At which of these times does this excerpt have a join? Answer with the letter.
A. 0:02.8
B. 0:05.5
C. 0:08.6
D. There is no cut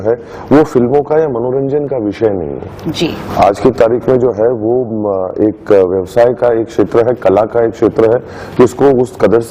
D